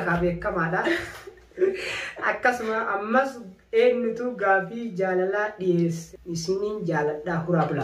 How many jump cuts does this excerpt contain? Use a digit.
1